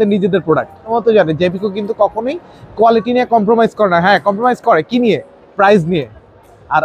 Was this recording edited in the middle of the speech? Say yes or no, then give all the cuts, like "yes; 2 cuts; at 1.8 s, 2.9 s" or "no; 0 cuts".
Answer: yes; 1 cut; at 0.9 s